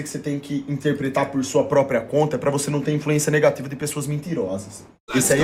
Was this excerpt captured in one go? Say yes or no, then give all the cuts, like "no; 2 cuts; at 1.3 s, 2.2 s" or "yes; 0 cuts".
yes; 0 cuts